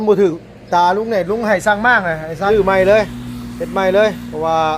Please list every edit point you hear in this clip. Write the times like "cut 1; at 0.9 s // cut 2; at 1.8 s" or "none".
cut 1; at 2.5 s